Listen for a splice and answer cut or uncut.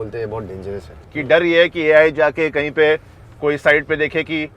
cut